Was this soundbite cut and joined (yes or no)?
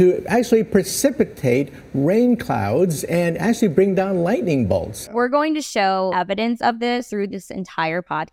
yes